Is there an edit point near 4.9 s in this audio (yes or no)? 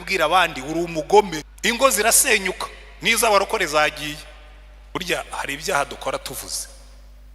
yes